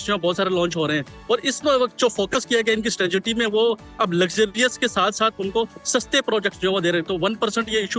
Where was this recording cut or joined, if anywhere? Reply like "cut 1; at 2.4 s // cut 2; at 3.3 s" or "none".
none